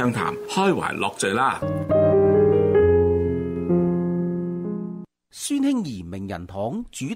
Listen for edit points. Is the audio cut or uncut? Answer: cut